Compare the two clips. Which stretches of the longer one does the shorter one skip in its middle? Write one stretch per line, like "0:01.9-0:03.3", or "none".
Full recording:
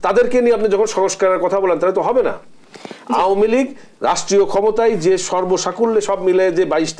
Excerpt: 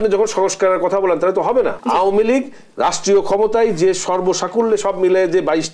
0:02.4-0:03.0